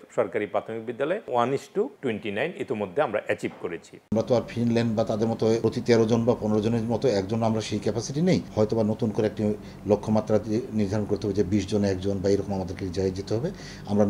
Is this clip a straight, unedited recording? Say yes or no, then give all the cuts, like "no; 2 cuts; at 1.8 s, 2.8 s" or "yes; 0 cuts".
no; 5 cuts; at 1.2 s, 1.9 s, 3.9 s, 5.6 s, 8.5 s